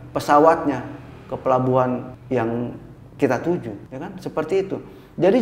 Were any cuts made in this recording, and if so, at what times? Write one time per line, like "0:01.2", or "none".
0:02.1
0:03.8